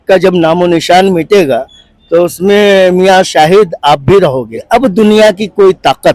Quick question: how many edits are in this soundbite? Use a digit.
1